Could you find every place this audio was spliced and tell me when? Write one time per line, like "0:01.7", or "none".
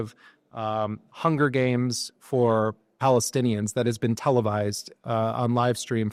none

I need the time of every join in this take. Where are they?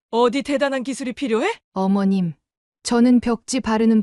0:01.6

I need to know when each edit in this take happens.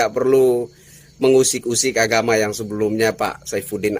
none

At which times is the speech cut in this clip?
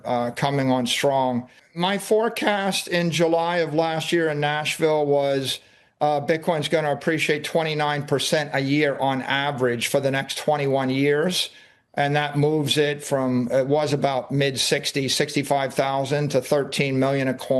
0:01.6

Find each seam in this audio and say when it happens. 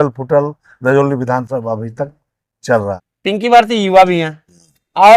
0:03.0

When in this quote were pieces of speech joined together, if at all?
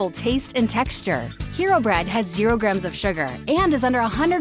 none

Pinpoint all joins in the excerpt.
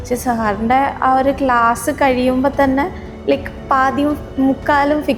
none

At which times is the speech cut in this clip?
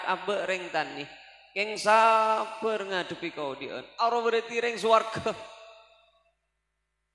none

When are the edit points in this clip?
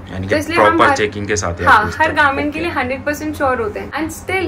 none

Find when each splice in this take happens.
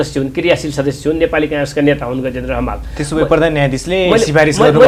none

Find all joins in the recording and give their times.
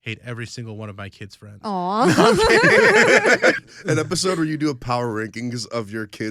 0:03.6

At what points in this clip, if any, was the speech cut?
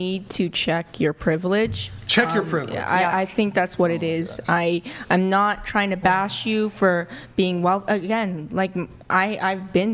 none

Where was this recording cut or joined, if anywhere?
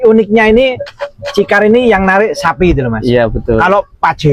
none

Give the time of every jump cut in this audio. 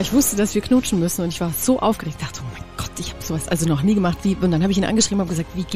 none

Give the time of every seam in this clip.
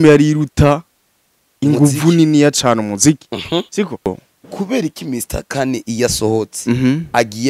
0:04.1

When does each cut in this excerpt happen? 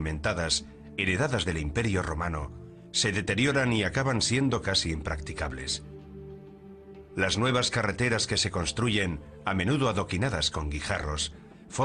0:03.7

